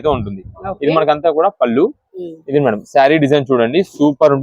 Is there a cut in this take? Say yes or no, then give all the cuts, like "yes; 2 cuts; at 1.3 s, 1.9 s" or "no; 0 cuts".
no; 0 cuts